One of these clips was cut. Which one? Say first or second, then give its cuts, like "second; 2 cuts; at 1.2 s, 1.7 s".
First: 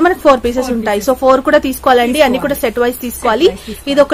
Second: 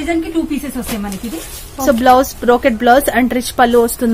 second; 1 cut; at 1.9 s